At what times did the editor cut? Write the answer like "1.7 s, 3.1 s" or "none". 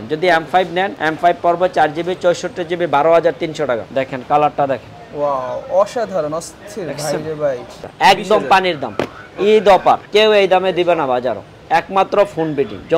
0.9 s, 3.9 s, 7.8 s, 10.0 s

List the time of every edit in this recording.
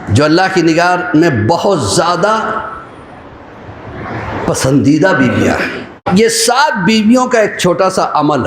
6.0 s

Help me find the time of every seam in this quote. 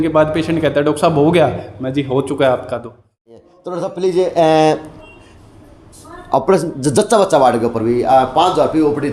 3.4 s

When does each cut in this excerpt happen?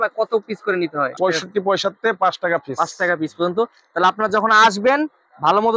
1.1 s

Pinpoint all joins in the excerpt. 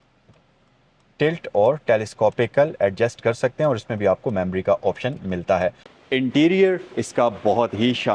5.9 s

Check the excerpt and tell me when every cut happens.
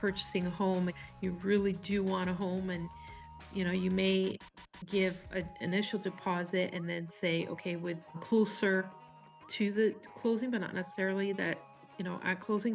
0.9 s, 8.2 s

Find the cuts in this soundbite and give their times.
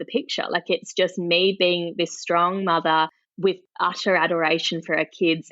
3.2 s

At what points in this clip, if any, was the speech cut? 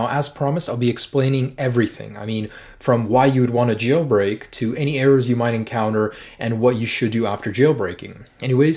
none

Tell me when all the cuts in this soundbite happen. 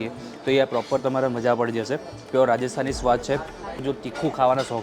3.8 s

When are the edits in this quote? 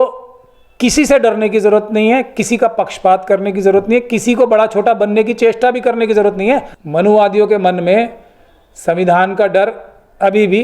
6.8 s

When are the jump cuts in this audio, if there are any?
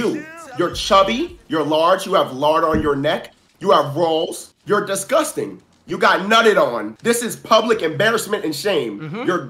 4.5 s, 6.9 s

